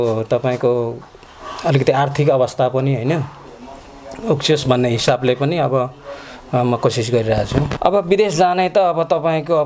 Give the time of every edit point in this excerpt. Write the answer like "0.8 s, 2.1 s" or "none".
7.7 s